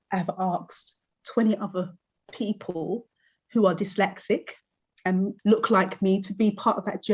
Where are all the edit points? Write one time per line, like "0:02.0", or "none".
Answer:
0:05.3